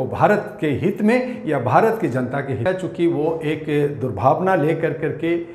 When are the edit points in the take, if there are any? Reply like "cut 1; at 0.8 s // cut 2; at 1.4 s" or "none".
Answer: cut 1; at 2.3 s